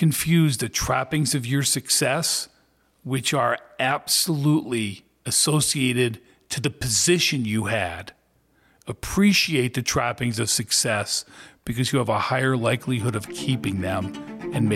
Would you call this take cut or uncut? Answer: uncut